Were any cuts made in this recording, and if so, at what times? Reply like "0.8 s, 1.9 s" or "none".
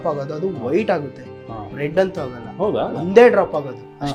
none